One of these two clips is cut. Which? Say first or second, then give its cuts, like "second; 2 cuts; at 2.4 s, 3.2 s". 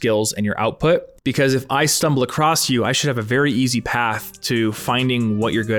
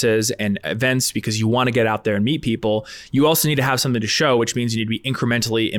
first; 1 cut; at 1.1 s